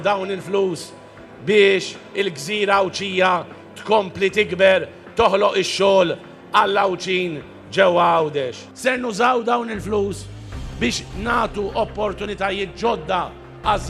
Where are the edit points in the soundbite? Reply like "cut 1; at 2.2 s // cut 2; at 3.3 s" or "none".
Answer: cut 1; at 6.3 s